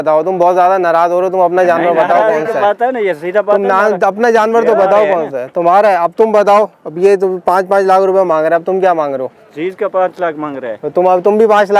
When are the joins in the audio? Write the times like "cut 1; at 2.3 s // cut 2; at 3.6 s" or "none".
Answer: none